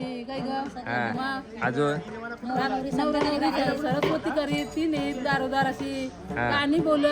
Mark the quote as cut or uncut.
uncut